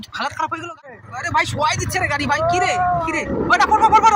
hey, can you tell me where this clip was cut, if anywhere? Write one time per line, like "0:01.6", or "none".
0:01.1